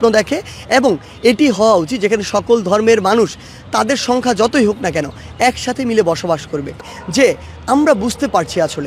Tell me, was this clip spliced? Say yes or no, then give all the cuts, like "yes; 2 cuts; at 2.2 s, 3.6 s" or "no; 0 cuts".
yes; 1 cut; at 6.8 s